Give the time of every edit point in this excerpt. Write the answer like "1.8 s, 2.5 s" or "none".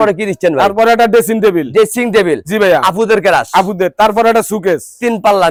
none